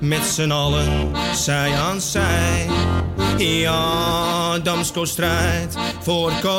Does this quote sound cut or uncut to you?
uncut